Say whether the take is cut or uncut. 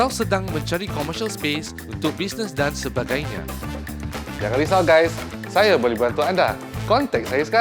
uncut